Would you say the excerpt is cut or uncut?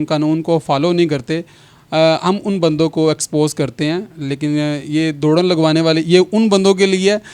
uncut